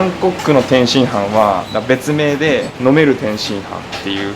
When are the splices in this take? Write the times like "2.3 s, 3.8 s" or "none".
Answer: 1.7 s, 2.7 s